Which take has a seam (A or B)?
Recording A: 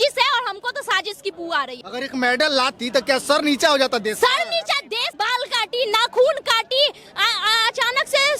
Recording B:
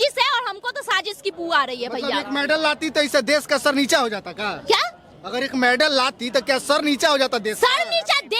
A